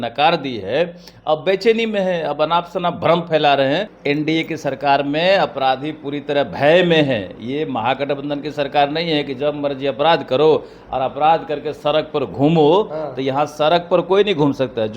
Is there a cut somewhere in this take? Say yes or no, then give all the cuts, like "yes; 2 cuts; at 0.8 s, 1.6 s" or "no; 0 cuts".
yes; 1 cut; at 3.9 s